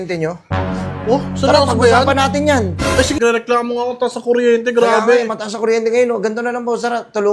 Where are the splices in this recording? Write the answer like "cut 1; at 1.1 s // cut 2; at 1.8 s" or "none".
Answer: cut 1; at 3.2 s